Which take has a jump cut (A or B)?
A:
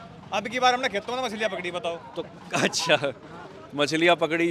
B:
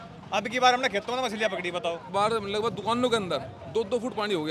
B